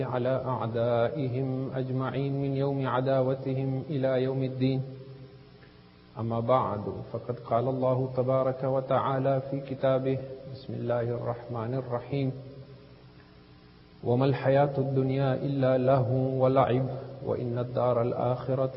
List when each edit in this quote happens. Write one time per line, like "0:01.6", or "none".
none